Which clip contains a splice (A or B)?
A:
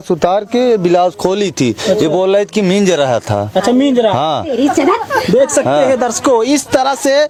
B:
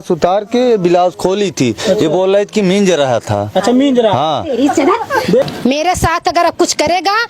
B